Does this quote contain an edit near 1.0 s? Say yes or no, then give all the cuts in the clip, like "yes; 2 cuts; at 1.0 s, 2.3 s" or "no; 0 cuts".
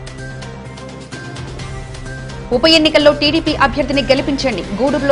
no; 1 cut; at 2.3 s